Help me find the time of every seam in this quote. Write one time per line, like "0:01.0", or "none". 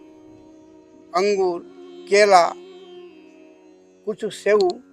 0:02.6
0:04.0